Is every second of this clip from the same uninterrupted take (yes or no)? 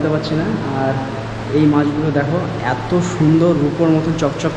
yes